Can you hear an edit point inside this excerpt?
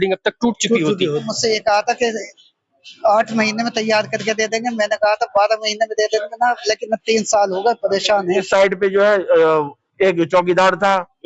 yes; 2 cuts; at 1.3 s, 8.4 s

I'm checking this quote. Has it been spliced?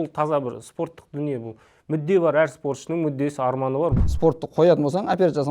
yes; 1 cut; at 4.0 s

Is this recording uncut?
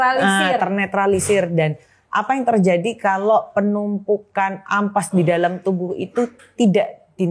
yes; 0 cuts

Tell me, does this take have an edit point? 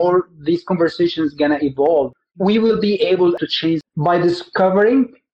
yes; 2 cuts; at 2.1 s, 3.4 s

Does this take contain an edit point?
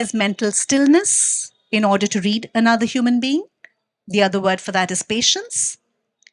no; 0 cuts

